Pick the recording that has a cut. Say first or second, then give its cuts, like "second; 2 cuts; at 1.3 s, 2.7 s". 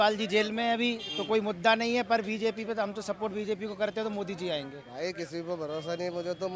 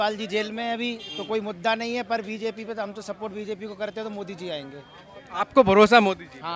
first; 1 cut; at 4.8 s